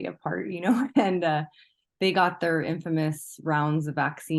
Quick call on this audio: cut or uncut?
uncut